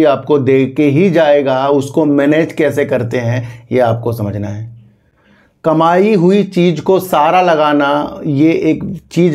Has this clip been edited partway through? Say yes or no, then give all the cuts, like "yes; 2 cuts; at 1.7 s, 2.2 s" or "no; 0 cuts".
no; 0 cuts